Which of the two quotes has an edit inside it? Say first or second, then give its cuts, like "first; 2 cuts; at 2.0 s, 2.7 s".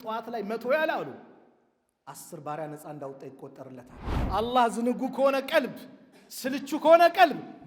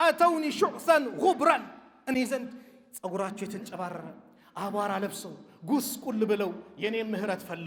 first; 1 cut; at 4.2 s